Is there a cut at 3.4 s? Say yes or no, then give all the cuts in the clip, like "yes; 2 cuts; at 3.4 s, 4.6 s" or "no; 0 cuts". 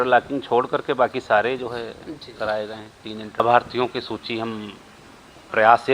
yes; 1 cut; at 3.4 s